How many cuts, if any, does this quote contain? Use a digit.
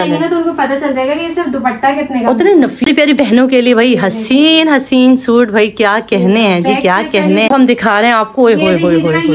2